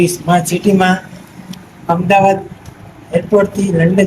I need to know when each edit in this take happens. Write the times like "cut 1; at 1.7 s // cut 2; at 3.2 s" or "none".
none